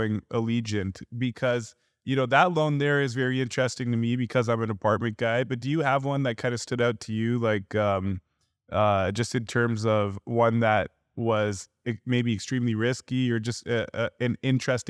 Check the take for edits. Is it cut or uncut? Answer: uncut